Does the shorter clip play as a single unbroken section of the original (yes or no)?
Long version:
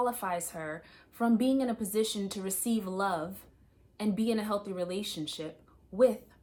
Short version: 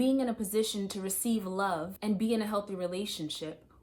no